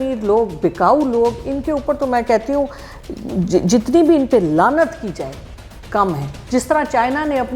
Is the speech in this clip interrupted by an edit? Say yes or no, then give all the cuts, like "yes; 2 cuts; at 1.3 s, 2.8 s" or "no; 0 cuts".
yes; 1 cut; at 6.3 s